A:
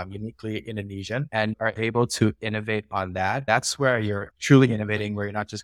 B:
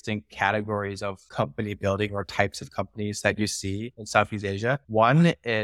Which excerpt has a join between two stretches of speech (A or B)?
A